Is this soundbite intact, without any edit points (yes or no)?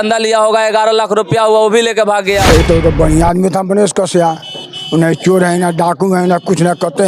no